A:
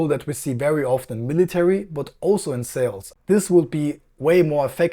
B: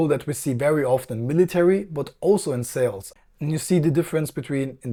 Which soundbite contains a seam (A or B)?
A